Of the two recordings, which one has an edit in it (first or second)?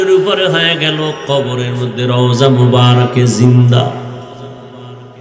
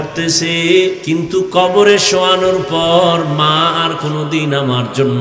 second